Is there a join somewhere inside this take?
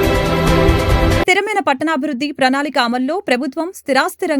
yes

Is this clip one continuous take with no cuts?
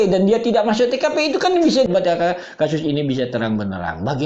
no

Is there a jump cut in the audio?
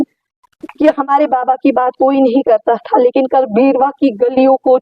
no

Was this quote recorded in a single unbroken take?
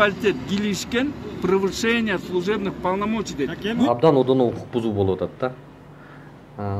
no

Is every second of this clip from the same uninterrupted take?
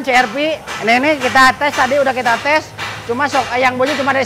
yes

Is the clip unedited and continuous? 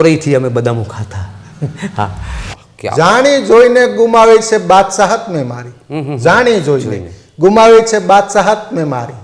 no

